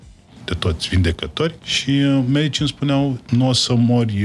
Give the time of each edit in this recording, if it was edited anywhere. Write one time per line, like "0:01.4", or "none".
0:01.7
0:03.2